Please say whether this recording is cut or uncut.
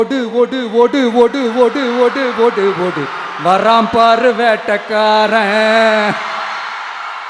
uncut